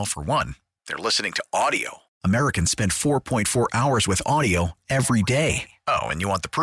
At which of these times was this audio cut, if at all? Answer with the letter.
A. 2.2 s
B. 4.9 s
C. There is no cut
C